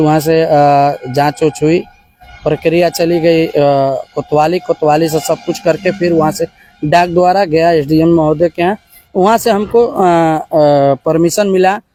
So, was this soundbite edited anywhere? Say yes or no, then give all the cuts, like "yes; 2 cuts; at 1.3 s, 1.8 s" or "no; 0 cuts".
no; 0 cuts